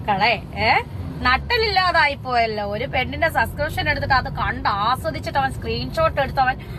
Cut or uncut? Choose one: uncut